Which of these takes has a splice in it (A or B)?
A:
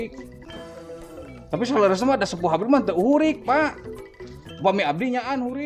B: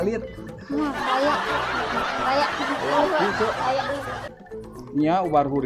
B